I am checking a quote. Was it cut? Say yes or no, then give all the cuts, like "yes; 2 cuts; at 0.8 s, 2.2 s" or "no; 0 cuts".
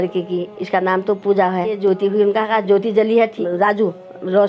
yes; 2 cuts; at 1.8 s, 3.4 s